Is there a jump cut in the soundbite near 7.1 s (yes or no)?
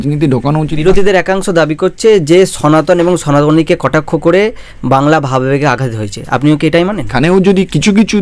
yes